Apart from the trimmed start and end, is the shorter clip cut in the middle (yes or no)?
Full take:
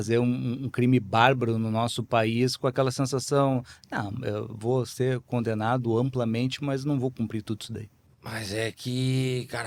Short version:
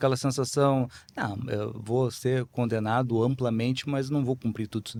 no